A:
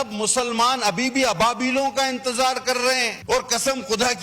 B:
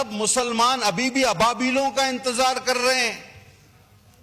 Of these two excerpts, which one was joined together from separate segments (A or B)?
A